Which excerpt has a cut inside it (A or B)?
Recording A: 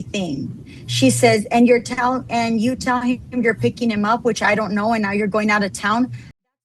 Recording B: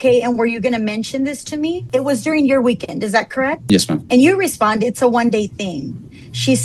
B